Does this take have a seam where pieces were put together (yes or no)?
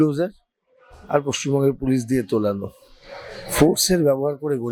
no